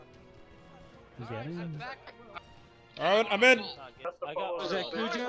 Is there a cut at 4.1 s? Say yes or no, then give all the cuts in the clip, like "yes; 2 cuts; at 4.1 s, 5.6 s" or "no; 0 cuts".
yes; 2 cuts; at 2.4 s, 4.1 s